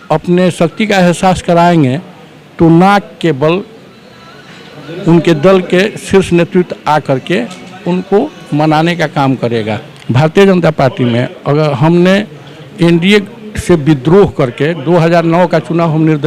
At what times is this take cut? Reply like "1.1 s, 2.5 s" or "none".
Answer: 9.9 s